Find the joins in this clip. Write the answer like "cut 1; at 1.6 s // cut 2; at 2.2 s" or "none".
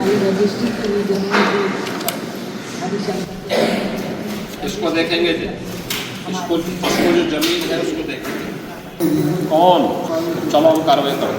cut 1; at 9.0 s // cut 2; at 10.0 s

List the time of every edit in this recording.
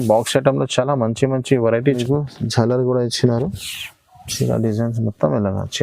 cut 1; at 2.0 s

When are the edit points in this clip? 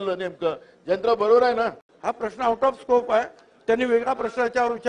cut 1; at 1.9 s

